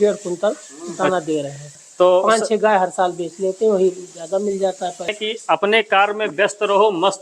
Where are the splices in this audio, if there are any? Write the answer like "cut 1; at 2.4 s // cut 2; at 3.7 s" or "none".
cut 1; at 1.6 s // cut 2; at 5.2 s